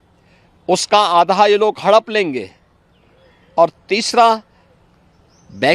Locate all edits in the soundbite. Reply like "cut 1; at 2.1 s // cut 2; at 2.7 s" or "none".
none